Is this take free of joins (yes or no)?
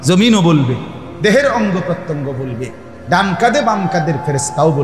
yes